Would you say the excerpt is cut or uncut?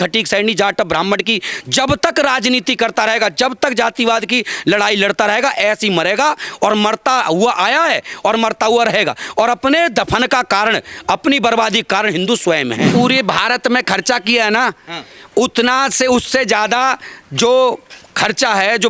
cut